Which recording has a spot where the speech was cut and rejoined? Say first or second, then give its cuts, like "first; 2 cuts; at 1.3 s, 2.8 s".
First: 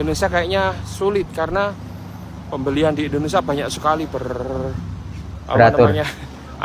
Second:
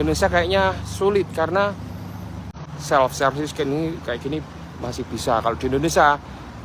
second; 1 cut; at 2.5 s